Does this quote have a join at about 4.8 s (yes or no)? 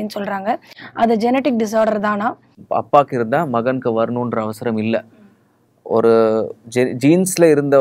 no